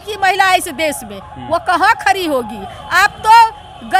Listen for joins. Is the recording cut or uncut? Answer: uncut